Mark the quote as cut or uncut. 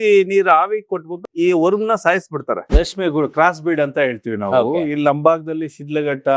cut